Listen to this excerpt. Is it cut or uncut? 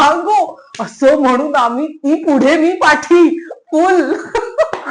uncut